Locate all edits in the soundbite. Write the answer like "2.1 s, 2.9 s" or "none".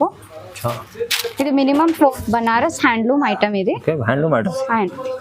2.1 s